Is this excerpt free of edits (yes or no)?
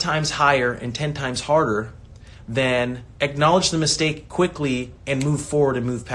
no